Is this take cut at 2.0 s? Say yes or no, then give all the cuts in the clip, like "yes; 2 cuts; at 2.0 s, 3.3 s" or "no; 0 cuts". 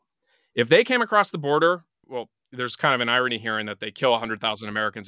yes; 1 cut; at 2.0 s